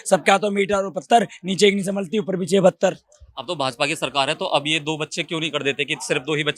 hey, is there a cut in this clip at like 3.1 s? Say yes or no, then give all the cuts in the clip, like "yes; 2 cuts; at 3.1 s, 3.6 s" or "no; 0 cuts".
no; 0 cuts